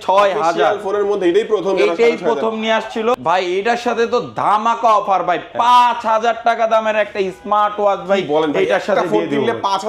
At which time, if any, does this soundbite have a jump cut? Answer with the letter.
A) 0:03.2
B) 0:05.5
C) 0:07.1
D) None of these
A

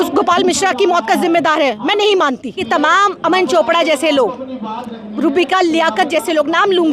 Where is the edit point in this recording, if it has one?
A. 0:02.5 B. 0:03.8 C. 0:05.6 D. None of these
A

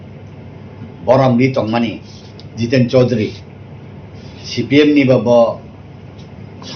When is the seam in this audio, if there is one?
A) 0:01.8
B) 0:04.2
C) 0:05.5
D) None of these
A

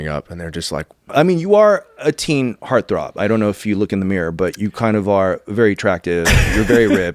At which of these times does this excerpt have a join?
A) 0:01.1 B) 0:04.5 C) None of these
A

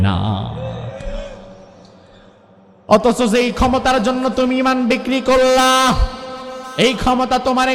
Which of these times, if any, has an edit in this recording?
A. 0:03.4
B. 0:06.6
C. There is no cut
C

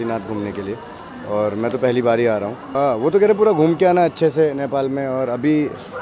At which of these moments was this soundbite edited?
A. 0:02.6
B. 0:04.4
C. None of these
A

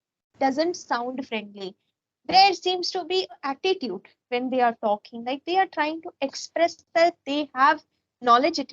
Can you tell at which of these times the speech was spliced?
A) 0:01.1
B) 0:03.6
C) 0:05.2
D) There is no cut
B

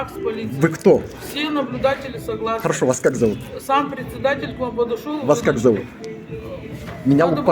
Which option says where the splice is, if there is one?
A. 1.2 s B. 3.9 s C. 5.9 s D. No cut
D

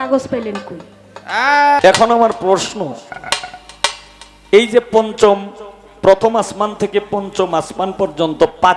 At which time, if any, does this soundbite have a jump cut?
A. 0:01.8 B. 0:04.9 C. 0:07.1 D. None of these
A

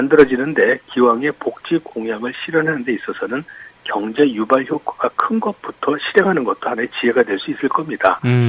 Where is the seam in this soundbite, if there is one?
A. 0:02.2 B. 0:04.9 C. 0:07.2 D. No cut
B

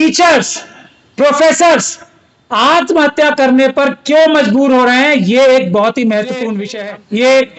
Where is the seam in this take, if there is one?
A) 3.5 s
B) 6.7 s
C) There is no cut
B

